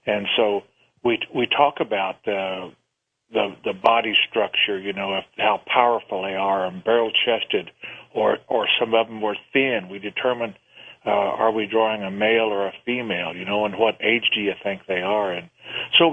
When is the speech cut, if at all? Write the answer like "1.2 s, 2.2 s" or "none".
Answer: 6.0 s